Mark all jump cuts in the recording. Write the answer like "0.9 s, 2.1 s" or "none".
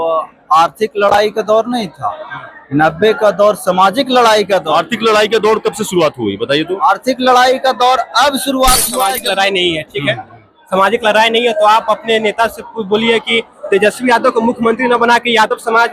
9.2 s